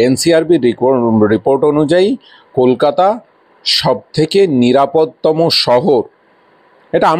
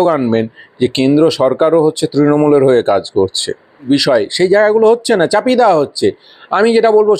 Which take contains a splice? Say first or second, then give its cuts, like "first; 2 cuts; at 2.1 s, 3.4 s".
second; 1 cut; at 3.9 s